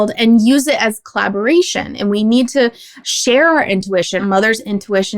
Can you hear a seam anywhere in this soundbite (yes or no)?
yes